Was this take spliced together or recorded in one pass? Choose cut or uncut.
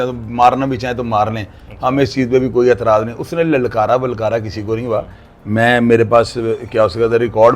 uncut